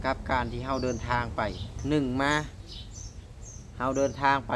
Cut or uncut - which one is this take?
cut